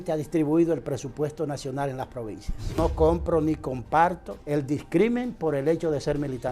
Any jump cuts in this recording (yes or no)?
yes